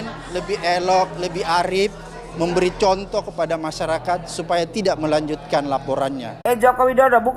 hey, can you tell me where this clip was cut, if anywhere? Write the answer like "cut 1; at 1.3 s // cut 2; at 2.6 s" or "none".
cut 1; at 6.4 s